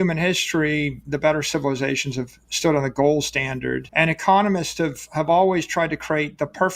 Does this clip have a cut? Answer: yes; 2 cuts; at 1.0 s, 3.9 s

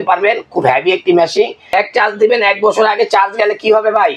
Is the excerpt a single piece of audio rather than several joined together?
no; 1 cut; at 1.7 s

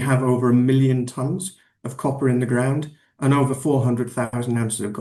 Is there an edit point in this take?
no; 0 cuts

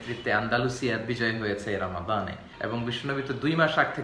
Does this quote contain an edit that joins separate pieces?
yes; 1 cut; at 2.4 s

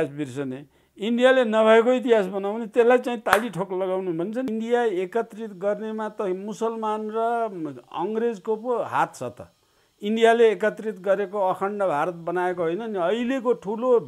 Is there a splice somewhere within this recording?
yes; 1 cut; at 4.5 s

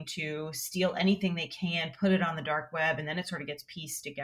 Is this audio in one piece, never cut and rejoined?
yes; 0 cuts

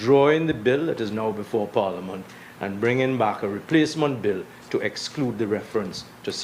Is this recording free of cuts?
yes; 0 cuts

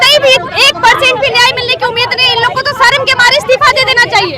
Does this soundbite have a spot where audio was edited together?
no; 0 cuts

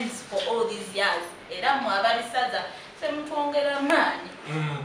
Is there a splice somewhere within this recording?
no; 0 cuts

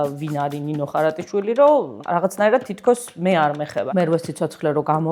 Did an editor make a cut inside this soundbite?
yes; 2 cuts; at 2.0 s, 3.8 s

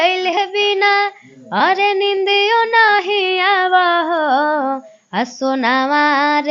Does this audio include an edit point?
no; 0 cuts

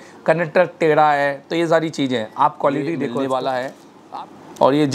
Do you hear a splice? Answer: yes; 1 cut; at 3.1 s

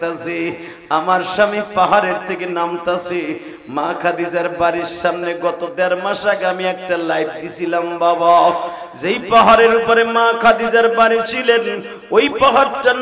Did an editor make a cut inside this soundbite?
no; 0 cuts

